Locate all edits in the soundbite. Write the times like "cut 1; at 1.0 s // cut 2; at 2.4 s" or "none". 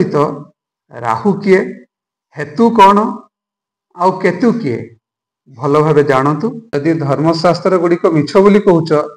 cut 1; at 6.6 s